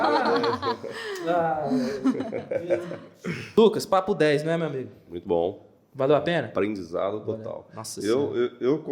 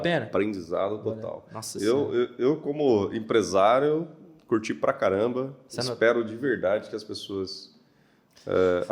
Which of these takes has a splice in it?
first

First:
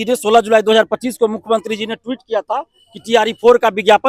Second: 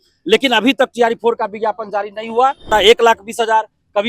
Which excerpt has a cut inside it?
second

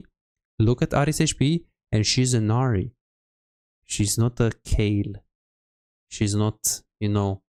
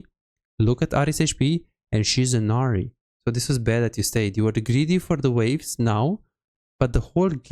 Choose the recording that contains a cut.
second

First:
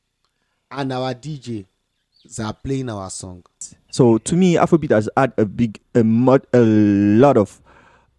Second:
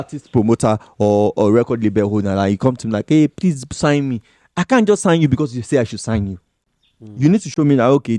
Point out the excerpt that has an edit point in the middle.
first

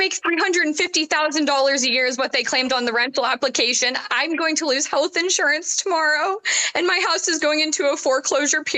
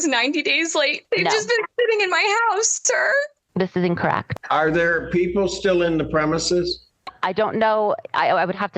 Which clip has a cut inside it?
second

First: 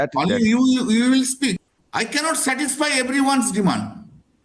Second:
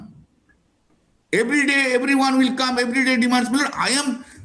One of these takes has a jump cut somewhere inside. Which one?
first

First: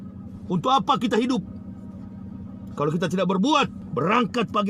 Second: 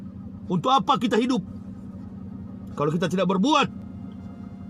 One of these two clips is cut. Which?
first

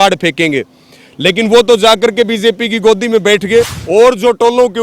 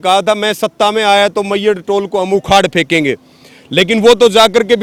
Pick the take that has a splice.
first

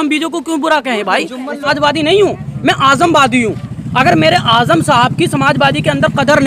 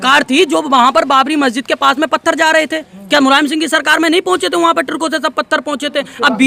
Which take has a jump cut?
first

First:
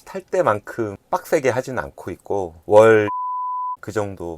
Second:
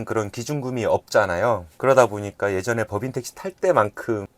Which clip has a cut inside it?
first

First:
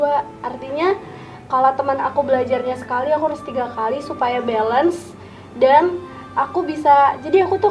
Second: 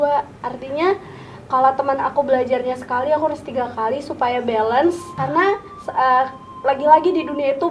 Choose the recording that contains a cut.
second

